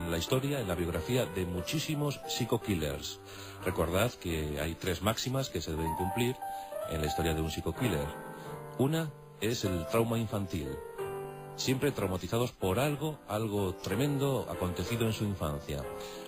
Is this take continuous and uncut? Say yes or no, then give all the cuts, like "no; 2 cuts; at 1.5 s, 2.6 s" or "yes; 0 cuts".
no; 1 cut; at 6.2 s